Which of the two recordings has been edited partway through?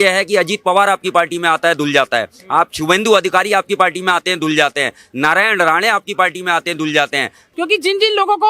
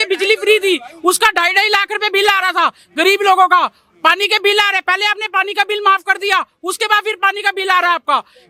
first; 1 cut; at 7.4 s

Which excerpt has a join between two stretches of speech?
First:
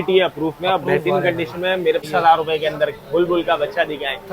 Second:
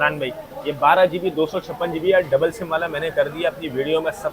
first; 1 cut; at 2.0 s

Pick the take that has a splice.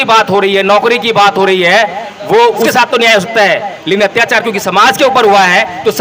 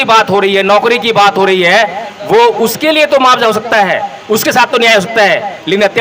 first; 1 cut; at 2.7 s

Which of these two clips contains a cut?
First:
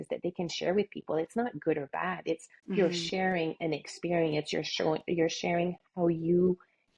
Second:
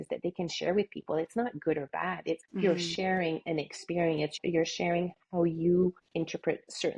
second; 3 cuts; at 2.5 s, 4.4 s, 6.0 s

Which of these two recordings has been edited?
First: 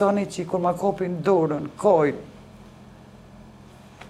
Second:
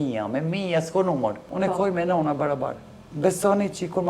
second; 1 cut; at 1.5 s

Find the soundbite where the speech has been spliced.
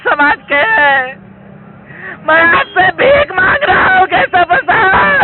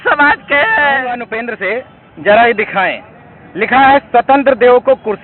second; 1 cut; at 1.4 s

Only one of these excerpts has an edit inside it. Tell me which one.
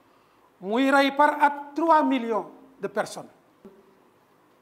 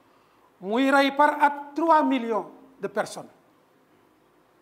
first; 1 cut; at 3.6 s

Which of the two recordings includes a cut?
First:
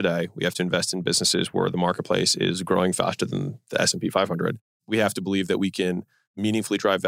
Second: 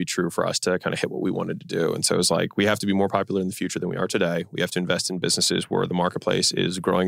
first; 1 cut; at 4.7 s

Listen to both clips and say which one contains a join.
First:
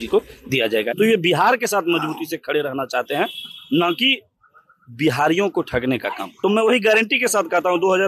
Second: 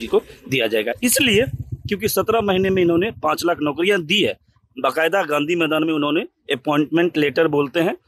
first; 2 cuts; at 0.9 s, 6.5 s

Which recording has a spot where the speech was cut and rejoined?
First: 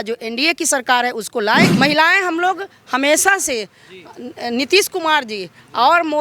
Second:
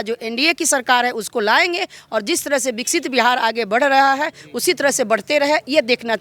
first; 1 cut; at 1.7 s

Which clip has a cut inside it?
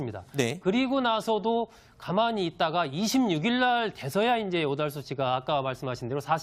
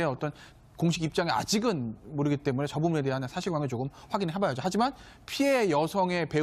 second; 1 cut; at 2.0 s

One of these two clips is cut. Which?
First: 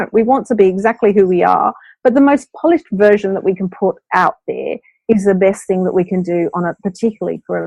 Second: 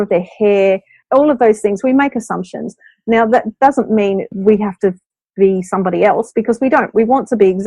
second; 2 cuts; at 0.9 s, 4.3 s

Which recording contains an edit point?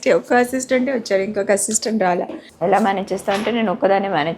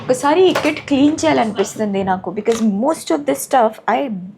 first; 1 cut; at 2.4 s

